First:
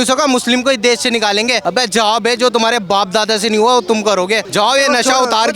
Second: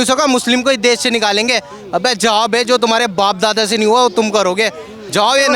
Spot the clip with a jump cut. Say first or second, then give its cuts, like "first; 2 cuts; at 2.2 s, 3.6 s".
first; 2 cuts; at 1.6 s, 4.4 s